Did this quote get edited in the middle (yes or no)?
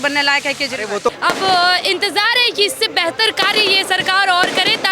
yes